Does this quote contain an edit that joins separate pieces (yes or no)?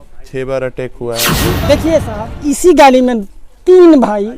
yes